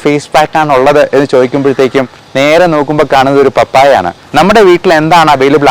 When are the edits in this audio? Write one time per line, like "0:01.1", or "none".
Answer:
0:04.2